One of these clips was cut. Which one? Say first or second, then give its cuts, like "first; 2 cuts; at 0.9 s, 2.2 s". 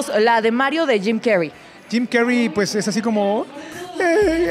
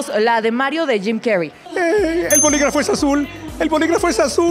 second; 1 cut; at 1.6 s